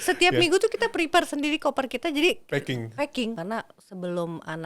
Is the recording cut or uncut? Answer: cut